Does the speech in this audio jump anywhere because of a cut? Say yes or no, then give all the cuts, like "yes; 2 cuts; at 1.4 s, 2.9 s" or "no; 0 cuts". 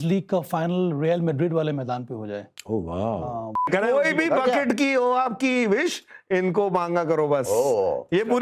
yes; 1 cut; at 3.7 s